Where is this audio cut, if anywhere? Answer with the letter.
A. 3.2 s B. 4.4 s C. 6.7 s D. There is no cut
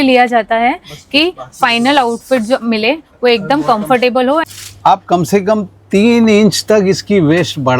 B